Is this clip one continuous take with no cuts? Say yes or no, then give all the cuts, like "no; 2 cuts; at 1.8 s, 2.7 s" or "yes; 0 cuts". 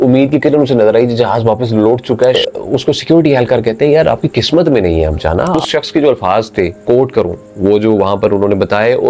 no; 2 cuts; at 2.4 s, 5.6 s